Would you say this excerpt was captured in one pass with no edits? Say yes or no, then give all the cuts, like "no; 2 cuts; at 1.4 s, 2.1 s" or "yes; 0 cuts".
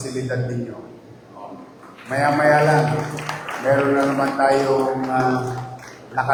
yes; 0 cuts